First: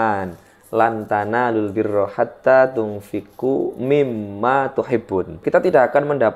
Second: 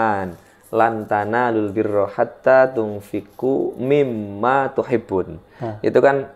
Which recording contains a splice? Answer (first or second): first